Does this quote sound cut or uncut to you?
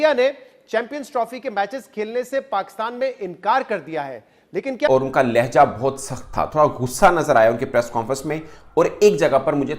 cut